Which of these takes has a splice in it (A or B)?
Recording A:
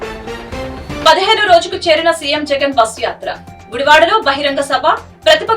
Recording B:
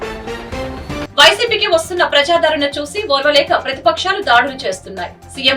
A